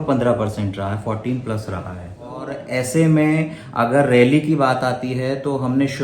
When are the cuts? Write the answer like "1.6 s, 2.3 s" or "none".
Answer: 2.6 s